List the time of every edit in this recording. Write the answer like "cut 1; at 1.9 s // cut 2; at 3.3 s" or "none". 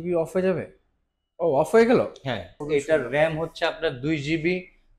cut 1; at 2.6 s